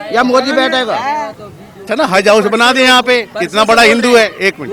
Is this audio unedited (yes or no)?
no